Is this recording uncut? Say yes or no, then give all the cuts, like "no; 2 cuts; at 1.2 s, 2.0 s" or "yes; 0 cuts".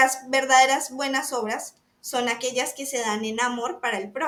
yes; 0 cuts